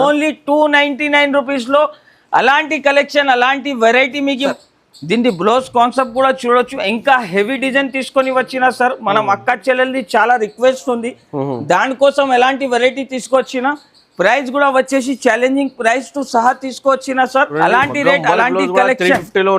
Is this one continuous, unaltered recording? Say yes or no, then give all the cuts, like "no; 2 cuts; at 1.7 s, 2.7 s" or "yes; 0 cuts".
no; 2 cuts; at 4.5 s, 17.5 s